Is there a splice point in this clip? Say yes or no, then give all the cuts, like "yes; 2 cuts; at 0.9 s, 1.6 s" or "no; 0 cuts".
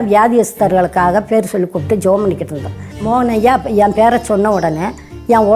yes; 1 cut; at 2.9 s